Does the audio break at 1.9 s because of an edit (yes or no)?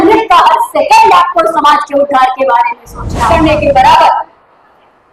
no